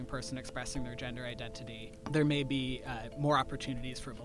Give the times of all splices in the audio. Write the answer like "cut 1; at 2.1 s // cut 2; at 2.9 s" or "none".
cut 1; at 1.9 s